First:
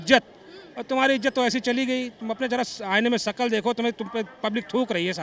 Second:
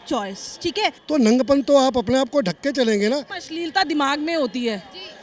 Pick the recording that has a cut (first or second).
second